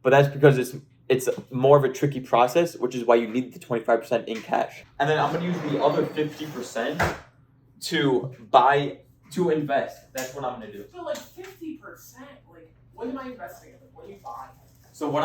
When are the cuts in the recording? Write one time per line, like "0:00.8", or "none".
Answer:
0:04.8